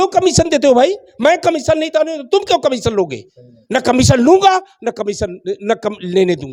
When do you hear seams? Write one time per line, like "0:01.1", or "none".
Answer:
none